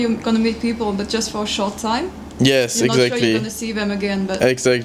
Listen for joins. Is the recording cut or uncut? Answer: uncut